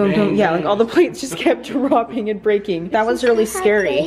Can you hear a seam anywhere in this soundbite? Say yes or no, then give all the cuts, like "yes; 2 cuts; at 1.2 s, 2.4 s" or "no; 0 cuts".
yes; 1 cut; at 2.8 s